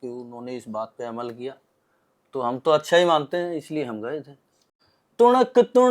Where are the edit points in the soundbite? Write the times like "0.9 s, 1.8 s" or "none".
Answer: 4.6 s